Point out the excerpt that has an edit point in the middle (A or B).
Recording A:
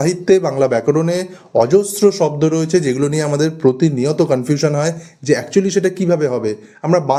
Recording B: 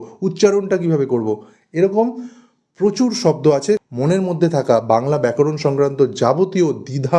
B